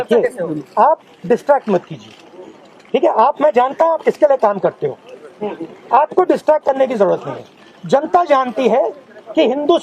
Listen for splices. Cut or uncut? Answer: uncut